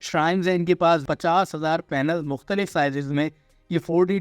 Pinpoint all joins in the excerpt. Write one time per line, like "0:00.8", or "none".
0:01.1